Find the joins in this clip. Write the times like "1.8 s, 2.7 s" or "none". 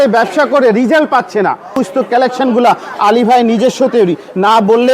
1.8 s